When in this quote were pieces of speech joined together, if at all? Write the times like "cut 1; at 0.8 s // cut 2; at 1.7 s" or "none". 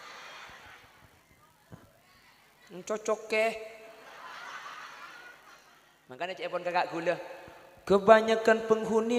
cut 1; at 6.2 s